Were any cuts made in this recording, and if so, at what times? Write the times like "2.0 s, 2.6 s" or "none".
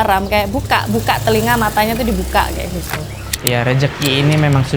3.3 s